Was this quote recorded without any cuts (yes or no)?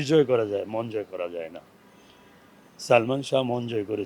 yes